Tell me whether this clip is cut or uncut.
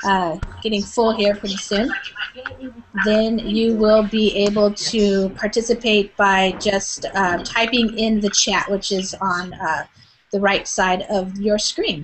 cut